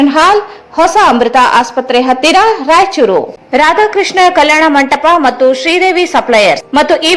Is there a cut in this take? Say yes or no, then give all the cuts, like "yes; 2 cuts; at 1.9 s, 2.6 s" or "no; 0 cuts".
yes; 1 cut; at 3.4 s